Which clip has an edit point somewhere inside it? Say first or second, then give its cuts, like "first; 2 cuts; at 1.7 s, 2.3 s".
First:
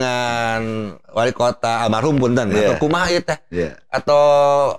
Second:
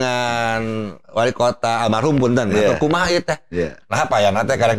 second; 1 cut; at 3.8 s